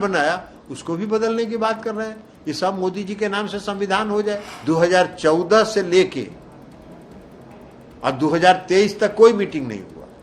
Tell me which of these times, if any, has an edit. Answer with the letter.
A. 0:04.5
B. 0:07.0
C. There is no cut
A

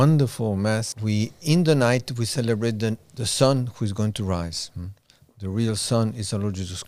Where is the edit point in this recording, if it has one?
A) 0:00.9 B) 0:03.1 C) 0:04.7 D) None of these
A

